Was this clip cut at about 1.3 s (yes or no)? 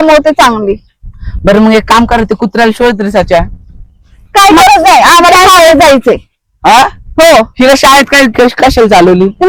no